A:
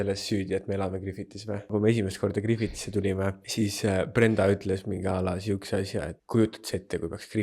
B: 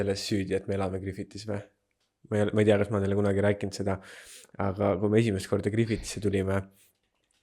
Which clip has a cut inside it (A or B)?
A